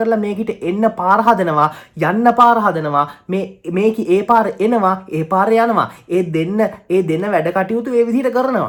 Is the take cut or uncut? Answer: uncut